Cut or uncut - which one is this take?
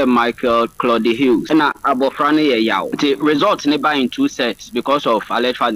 cut